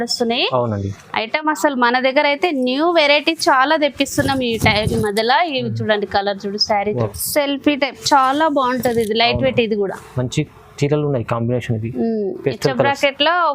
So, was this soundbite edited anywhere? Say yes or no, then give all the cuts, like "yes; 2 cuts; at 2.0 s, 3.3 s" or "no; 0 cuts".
yes; 1 cut; at 7.1 s